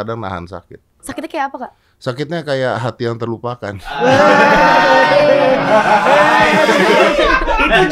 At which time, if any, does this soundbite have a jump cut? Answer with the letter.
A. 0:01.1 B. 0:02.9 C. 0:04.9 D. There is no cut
A